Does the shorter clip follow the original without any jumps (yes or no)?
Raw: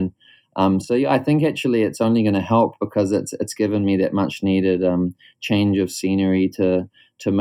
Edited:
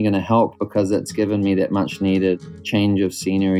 no